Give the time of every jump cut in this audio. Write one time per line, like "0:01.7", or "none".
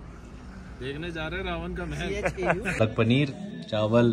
0:02.8